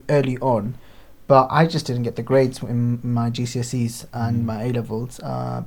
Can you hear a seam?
no; 0 cuts

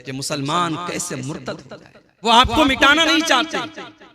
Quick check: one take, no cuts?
no; 1 cut; at 2.3 s

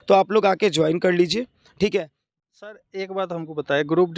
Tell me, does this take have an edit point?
yes; 1 cut; at 2.2 s

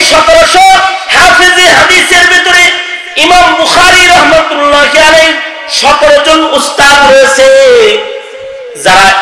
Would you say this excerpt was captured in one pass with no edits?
yes; 0 cuts

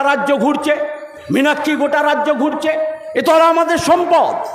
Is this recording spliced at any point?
no; 0 cuts

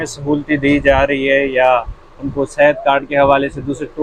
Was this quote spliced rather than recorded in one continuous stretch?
no; 0 cuts

